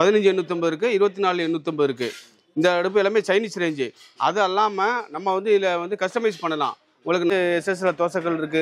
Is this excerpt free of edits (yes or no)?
no